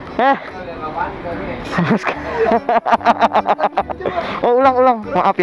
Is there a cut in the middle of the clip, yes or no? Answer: no